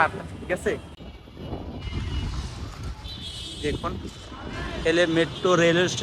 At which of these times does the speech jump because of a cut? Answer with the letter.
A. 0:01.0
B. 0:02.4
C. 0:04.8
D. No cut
A